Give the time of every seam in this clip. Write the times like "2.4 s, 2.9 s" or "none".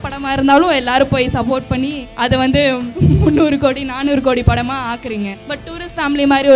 2.0 s, 2.9 s, 5.5 s